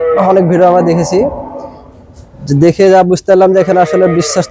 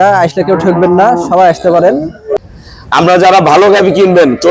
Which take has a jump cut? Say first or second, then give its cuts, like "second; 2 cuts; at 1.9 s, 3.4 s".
second; 1 cut; at 2.4 s